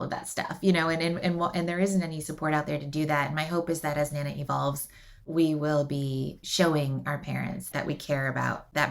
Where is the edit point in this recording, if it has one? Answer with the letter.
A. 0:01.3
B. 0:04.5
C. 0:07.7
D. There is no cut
C